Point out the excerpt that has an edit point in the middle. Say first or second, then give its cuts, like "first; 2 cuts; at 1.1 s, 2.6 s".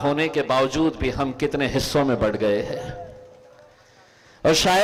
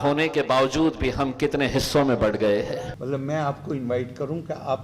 second; 1 cut; at 2.9 s